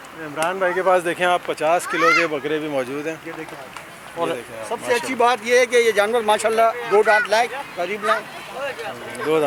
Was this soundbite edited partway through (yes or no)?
no